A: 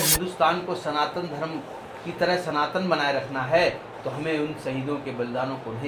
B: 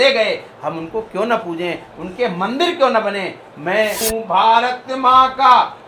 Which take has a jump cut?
B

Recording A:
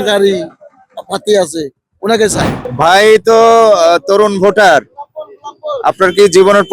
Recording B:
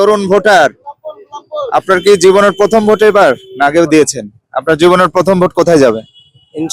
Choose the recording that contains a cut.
A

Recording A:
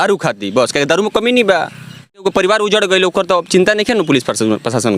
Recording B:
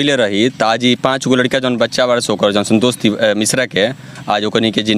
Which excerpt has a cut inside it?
A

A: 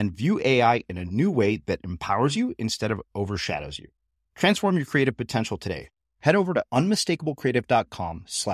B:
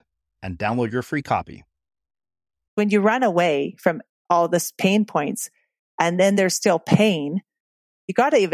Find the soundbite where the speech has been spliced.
B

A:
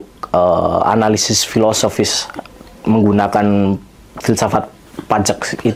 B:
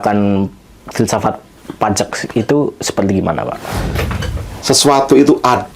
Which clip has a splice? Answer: B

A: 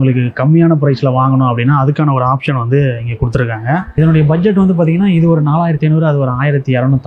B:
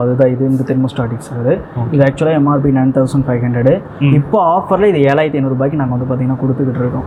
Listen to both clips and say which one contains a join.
A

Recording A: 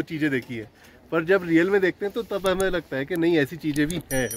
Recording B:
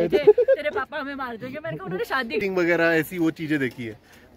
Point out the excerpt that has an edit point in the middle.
B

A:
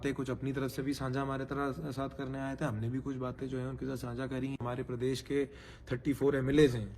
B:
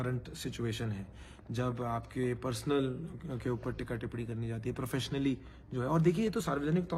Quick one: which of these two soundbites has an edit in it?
A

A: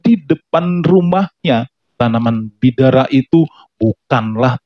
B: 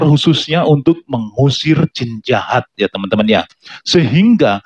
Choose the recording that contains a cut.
A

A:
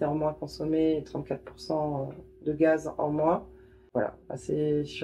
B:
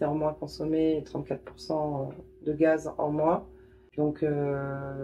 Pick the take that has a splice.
A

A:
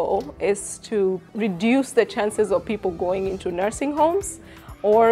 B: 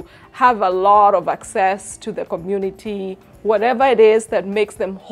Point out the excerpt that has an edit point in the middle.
A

